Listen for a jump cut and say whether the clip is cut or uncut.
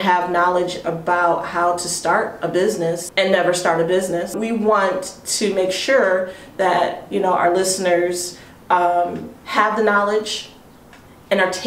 cut